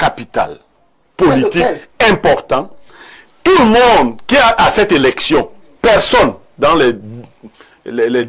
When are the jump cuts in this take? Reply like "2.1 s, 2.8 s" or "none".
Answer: none